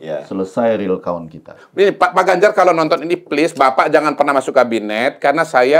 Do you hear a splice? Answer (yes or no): yes